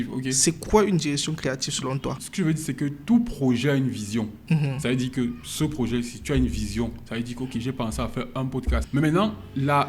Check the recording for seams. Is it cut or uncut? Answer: cut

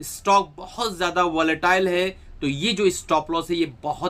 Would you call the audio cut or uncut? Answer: uncut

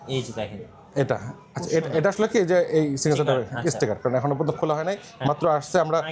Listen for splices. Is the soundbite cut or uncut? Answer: uncut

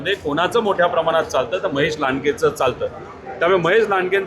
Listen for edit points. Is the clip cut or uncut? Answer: uncut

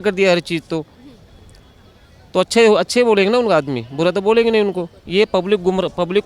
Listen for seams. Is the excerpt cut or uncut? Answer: cut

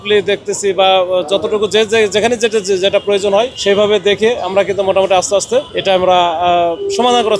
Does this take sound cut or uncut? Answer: cut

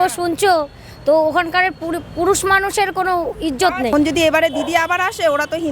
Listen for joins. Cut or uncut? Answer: cut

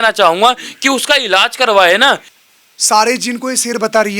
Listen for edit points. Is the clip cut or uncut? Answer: cut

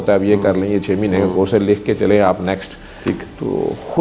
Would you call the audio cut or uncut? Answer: uncut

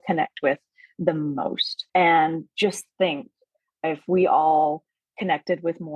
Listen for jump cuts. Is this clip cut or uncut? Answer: cut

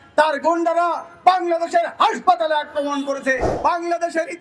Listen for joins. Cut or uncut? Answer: cut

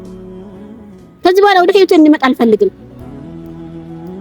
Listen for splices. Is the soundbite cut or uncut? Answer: cut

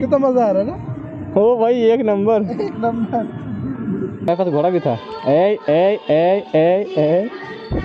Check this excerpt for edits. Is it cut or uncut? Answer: cut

